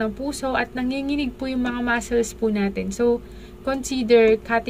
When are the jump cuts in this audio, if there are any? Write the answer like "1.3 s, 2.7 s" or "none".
none